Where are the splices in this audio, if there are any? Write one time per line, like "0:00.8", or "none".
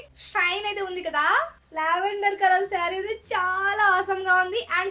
0:01.6

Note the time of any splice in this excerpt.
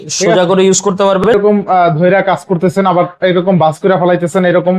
0:01.3

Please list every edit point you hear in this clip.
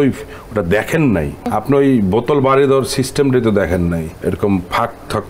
0:01.5
0:04.0

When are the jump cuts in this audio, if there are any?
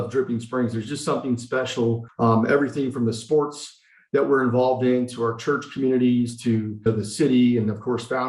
0:02.1
0:06.9

